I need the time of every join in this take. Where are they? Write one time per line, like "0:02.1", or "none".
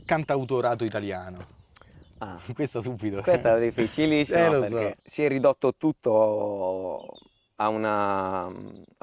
0:05.0